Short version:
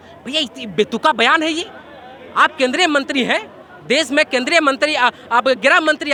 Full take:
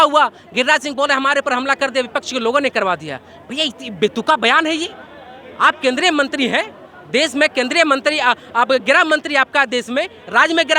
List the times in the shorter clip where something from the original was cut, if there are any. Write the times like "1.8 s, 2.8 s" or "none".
none